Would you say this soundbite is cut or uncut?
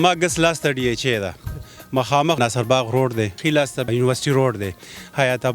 cut